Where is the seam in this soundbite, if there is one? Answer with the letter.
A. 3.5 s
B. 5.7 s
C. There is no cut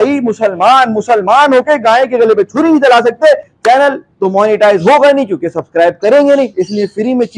A